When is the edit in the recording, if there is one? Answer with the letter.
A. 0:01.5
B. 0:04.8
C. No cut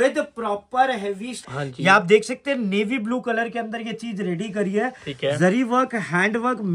A